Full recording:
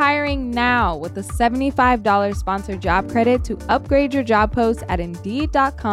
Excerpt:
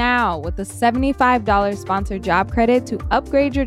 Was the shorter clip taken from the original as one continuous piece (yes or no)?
yes